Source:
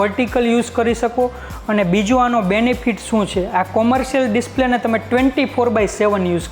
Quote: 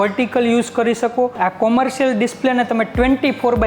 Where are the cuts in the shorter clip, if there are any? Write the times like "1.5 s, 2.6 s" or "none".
1.3 s